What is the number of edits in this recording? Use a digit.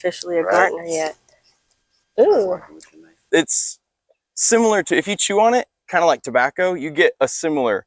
1